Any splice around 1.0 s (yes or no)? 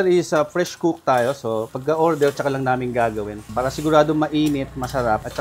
no